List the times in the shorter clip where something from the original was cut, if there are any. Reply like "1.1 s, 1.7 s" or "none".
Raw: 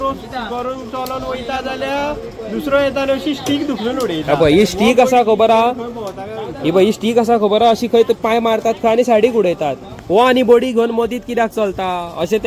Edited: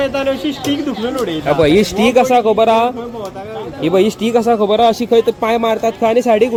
none